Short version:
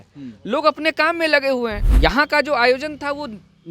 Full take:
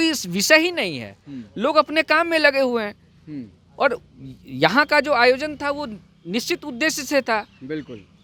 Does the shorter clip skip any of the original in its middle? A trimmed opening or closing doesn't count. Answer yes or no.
yes